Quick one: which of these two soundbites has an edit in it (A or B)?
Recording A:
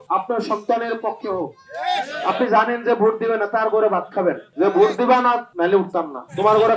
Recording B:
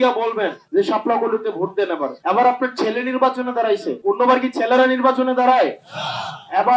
A